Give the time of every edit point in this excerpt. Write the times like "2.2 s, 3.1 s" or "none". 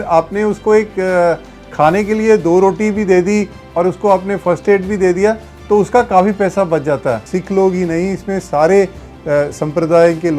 7.3 s